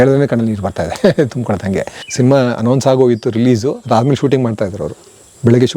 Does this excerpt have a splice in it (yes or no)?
yes